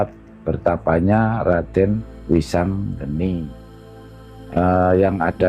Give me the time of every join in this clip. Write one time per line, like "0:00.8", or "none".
0:02.1
0:03.9